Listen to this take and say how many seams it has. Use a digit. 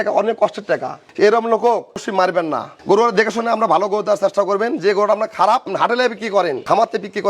2